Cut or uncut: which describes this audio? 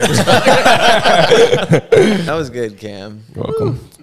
cut